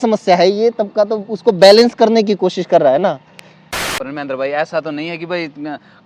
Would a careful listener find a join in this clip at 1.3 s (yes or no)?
no